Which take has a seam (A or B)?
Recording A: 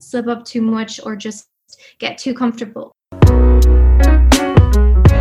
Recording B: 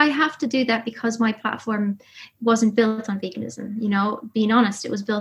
A